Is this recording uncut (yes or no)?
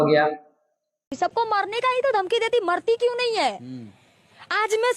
no